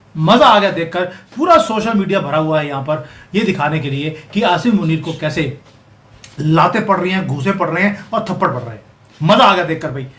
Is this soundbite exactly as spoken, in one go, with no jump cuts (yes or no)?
yes